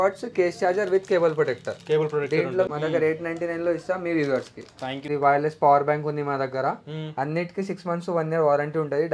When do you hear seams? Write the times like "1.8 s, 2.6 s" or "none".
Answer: 2.7 s, 5.1 s